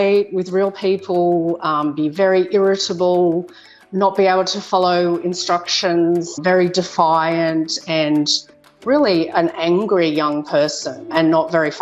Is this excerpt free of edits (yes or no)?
yes